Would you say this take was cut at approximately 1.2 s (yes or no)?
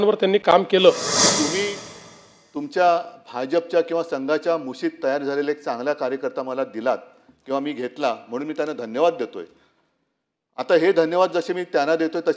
yes